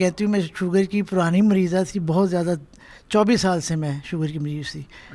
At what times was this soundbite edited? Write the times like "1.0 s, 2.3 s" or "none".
none